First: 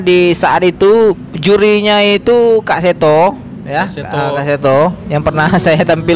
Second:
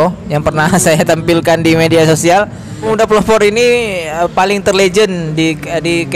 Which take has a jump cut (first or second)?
second